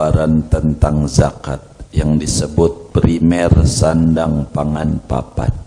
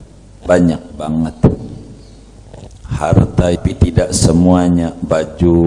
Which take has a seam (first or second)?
second